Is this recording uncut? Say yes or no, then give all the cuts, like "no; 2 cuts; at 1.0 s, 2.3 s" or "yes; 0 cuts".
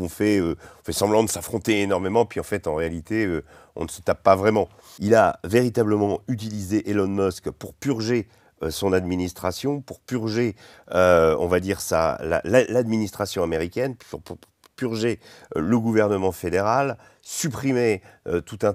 no; 1 cut; at 4.8 s